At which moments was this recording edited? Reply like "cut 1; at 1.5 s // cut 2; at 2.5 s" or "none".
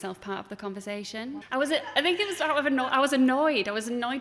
cut 1; at 1.3 s